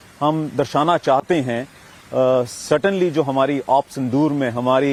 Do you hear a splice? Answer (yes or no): no